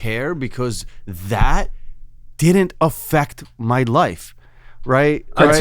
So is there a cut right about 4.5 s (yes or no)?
no